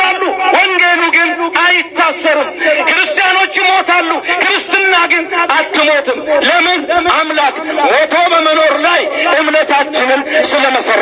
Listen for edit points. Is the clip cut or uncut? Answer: uncut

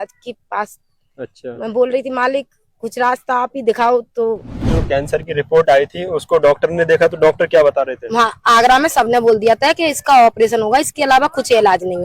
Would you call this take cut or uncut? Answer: cut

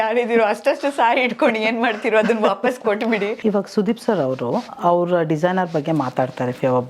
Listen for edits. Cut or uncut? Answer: cut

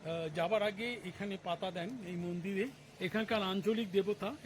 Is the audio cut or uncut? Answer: cut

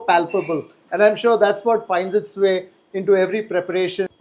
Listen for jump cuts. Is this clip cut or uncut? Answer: uncut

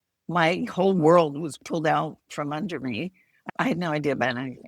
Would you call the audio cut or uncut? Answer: cut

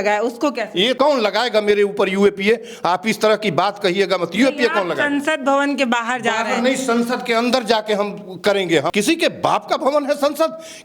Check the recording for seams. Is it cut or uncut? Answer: cut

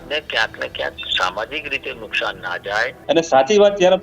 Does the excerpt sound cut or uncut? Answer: cut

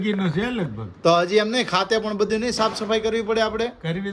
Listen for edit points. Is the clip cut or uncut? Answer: uncut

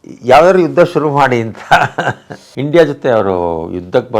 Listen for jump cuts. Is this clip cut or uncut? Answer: cut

